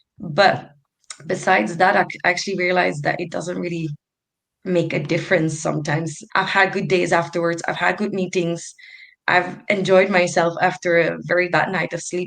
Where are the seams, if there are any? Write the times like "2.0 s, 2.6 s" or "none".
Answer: 6.2 s, 9.1 s